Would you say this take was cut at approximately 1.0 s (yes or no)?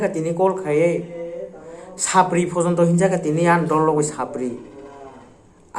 no